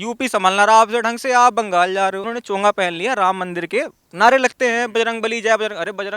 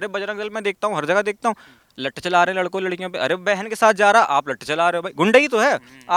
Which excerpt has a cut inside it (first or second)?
first